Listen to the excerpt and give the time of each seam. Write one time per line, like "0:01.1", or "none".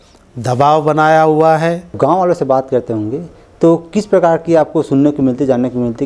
0:01.9